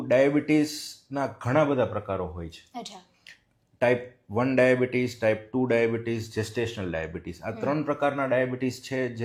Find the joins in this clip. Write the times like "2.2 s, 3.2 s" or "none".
none